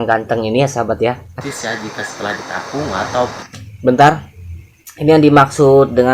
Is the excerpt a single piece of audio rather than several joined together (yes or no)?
no